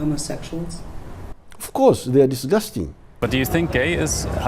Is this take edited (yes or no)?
yes